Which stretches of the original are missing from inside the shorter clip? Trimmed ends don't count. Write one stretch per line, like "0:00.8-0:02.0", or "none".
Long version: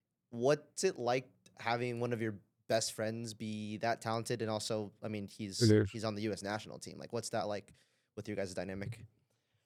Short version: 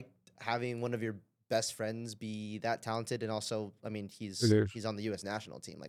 none

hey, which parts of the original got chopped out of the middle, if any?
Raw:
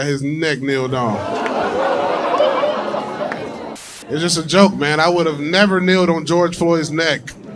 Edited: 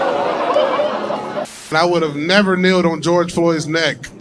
0:03.5-0:04.9

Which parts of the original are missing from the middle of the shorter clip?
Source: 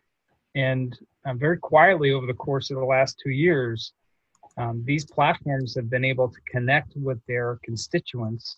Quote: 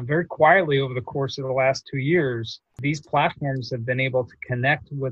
0:04.0-0:04.8

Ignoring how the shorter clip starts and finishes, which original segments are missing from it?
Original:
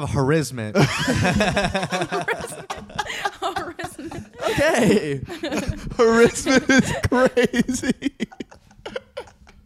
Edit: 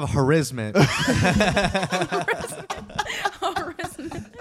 none

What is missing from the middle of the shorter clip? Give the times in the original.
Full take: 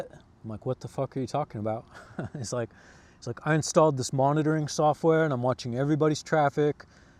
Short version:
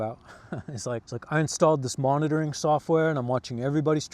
0:02.7-0:03.2

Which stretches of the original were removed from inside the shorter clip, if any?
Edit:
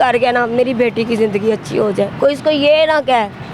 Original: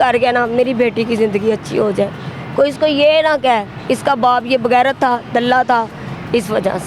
0:02.1-0:02.5

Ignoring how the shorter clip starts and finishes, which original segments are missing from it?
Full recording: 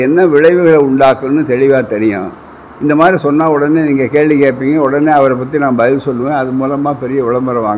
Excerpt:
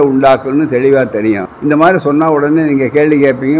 0:02.3-0:02.7

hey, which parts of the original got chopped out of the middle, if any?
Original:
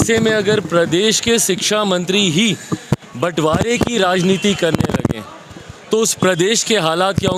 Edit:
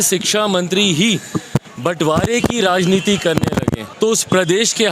0:05.2-0:05.8

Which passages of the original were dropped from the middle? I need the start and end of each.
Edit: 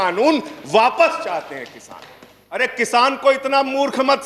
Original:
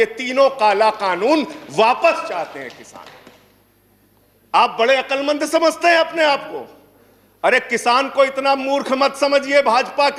0:03.6-0:07.5

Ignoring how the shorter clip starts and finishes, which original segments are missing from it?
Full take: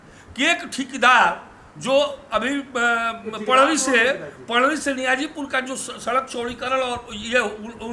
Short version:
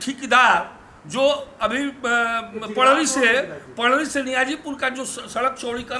none

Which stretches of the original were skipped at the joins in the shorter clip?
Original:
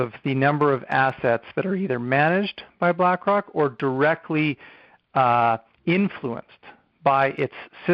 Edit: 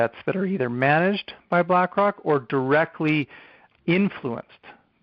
0:05.0-0:05.7

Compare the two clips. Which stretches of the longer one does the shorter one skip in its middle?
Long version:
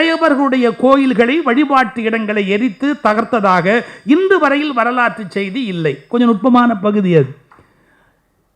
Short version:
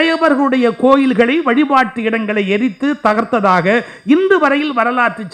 none

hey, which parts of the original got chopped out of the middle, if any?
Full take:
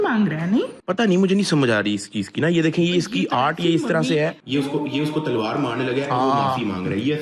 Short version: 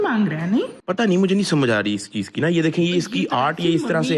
none

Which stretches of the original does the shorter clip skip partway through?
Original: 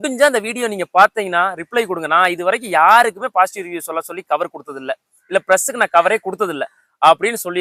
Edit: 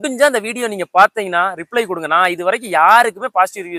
none

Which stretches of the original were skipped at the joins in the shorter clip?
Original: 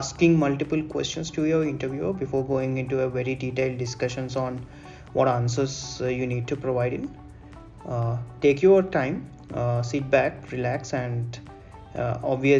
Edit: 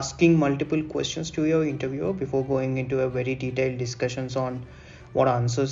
none

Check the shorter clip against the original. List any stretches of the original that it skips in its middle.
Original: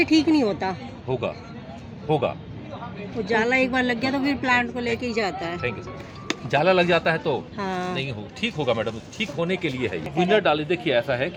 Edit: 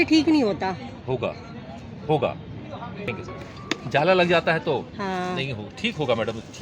0:03.1-0:05.7

